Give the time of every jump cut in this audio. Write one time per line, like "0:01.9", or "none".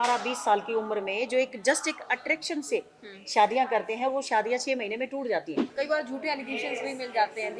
0:05.6